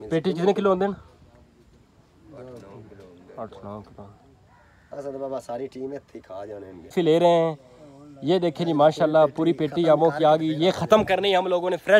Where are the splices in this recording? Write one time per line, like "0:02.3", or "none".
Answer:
0:06.8